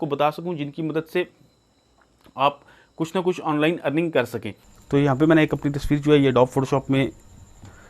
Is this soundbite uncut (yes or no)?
no